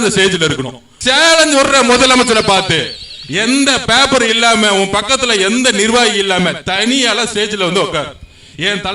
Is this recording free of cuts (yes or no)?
no